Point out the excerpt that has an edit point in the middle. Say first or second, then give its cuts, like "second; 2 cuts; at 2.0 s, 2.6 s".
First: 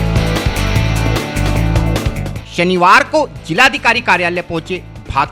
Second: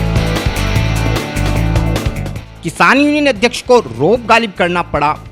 second; 1 cut; at 2.4 s